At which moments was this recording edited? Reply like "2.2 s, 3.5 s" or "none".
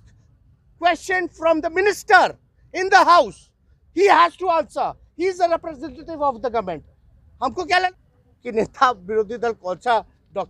7.9 s